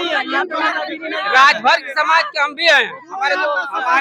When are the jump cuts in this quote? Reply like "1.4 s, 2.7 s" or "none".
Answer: none